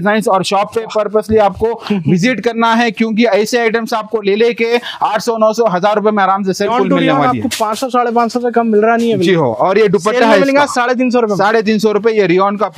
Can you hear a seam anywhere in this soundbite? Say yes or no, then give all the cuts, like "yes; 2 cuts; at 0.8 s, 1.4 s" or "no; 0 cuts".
yes; 1 cut; at 6.6 s